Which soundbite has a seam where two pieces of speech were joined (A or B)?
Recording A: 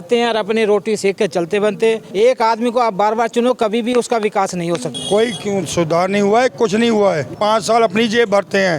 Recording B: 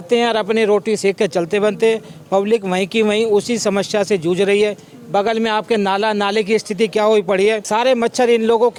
A